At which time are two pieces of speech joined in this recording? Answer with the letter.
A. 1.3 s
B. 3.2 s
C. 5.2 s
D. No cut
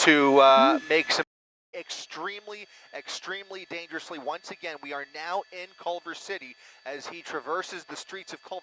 A